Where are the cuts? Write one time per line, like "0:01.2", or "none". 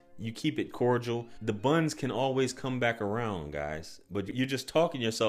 none

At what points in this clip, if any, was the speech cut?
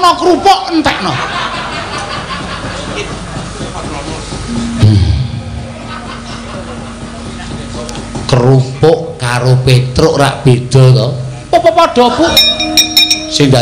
0:12.3

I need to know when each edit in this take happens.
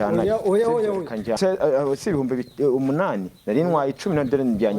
0:01.4

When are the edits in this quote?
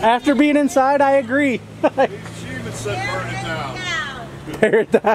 none

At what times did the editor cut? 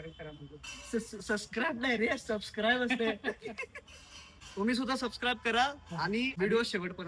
0:04.2
0:06.3

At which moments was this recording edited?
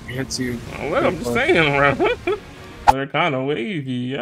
0:02.9

